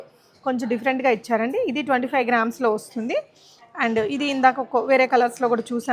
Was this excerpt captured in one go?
yes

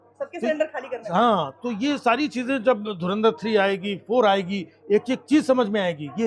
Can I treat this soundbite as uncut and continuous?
yes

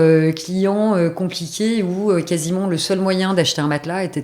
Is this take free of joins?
yes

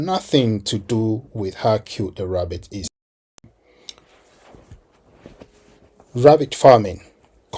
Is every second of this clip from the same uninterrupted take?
no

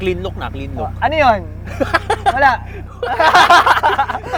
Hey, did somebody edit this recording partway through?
no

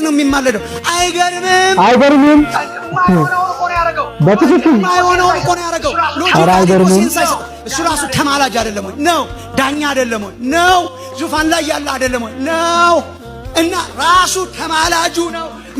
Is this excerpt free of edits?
yes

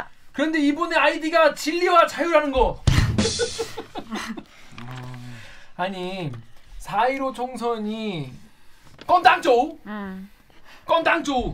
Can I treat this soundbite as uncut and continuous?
yes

